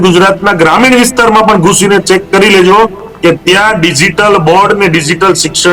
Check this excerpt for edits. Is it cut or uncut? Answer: uncut